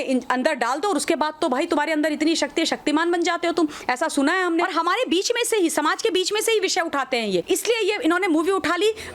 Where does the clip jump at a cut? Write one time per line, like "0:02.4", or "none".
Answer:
0:04.7
0:07.4